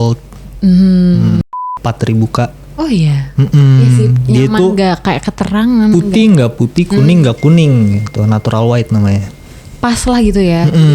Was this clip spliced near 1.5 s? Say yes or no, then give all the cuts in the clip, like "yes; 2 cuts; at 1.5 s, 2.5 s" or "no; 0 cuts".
yes; 1 cut; at 1.5 s